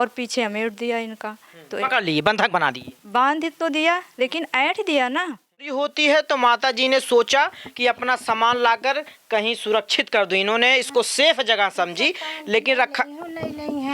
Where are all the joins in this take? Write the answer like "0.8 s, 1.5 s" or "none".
5.7 s